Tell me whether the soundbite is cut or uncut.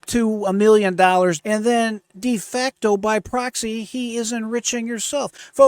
cut